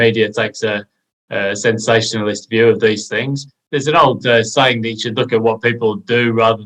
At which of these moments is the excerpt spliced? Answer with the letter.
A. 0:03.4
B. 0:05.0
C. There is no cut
A